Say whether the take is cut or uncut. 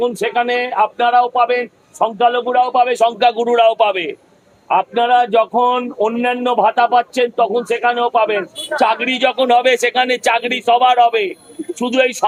uncut